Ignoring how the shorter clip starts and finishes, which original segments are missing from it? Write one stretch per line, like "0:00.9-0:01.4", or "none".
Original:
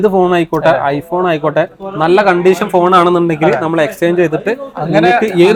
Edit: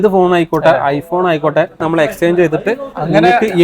0:01.8-0:03.6